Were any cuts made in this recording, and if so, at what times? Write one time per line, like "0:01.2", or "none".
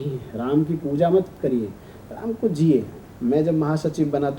0:03.0